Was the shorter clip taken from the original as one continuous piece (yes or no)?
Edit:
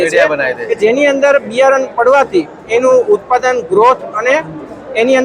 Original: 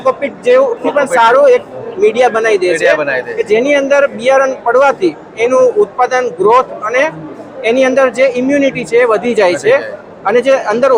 yes